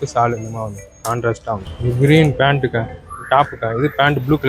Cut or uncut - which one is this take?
cut